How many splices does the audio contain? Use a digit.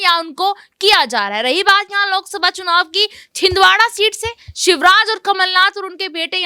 0